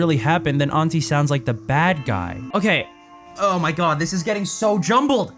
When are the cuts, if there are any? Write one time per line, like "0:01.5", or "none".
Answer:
0:02.4